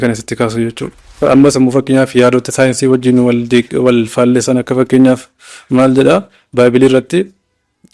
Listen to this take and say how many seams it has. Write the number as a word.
one